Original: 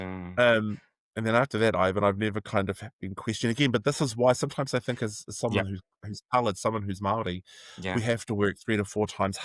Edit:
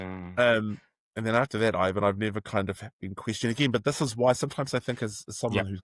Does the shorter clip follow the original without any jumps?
yes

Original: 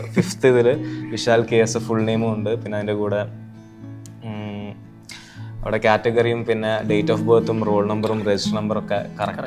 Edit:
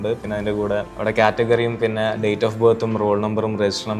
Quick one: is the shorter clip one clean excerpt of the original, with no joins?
no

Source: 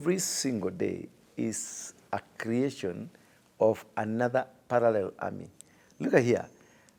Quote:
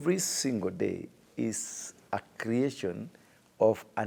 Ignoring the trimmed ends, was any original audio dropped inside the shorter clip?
no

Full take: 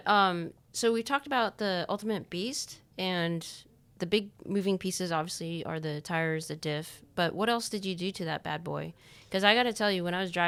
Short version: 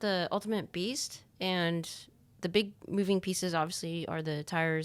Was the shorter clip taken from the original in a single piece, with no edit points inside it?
yes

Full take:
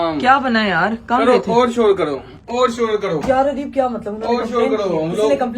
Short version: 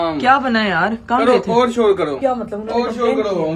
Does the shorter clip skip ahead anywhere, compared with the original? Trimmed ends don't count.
yes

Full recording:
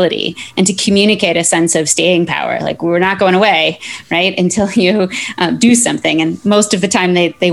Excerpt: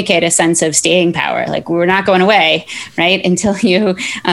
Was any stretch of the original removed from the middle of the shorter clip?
no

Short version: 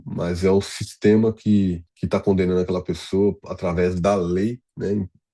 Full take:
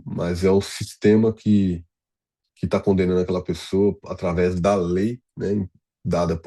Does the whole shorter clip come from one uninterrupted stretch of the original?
no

